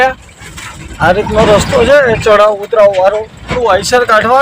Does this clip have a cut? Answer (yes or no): yes